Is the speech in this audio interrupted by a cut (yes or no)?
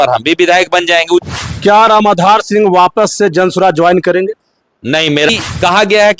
yes